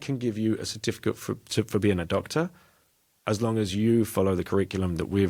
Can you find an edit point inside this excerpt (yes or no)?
no